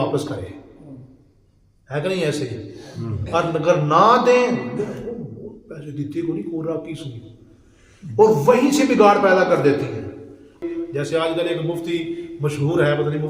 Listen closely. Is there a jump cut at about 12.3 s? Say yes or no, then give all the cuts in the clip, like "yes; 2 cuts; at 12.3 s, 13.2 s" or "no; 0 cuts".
no; 1 cut; at 10.6 s